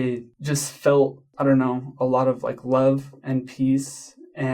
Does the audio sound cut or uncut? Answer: cut